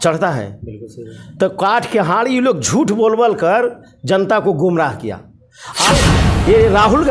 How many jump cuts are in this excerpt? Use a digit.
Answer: 1